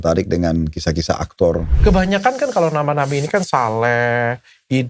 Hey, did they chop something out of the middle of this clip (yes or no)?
yes